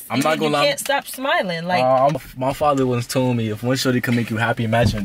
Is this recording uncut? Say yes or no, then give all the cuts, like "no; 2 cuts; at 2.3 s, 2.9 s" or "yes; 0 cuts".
no; 1 cut; at 2.2 s